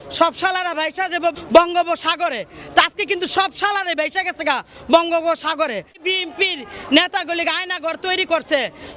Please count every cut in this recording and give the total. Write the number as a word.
two